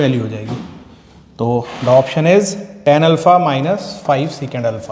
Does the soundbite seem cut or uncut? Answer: cut